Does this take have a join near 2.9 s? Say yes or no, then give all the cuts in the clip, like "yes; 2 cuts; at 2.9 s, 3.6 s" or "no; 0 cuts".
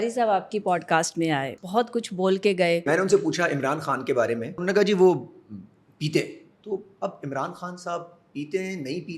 yes; 3 cuts; at 1.6 s, 2.9 s, 4.6 s